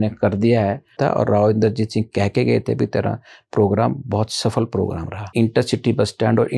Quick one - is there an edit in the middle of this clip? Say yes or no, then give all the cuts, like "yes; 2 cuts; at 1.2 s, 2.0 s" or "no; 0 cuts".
yes; 2 cuts; at 1.0 s, 5.3 s